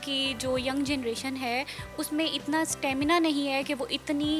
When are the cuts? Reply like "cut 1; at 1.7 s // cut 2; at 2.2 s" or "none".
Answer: none

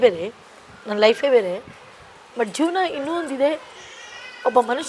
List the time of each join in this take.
none

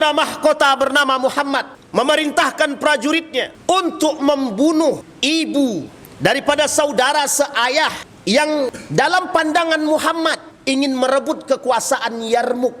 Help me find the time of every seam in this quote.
cut 1; at 1.8 s // cut 2; at 3.5 s // cut 3; at 5.1 s // cut 4; at 6.0 s // cut 5; at 8.1 s // cut 6; at 8.8 s // cut 7; at 10.5 s

